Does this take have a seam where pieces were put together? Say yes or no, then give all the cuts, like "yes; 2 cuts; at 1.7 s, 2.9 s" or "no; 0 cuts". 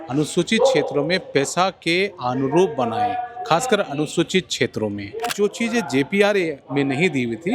yes; 1 cut; at 5.3 s